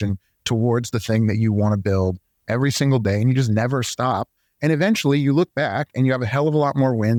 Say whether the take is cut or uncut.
uncut